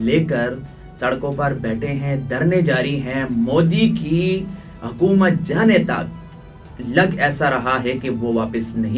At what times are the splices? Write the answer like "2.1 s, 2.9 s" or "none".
none